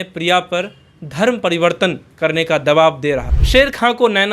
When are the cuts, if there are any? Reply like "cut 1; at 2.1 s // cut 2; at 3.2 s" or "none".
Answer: cut 1; at 3.3 s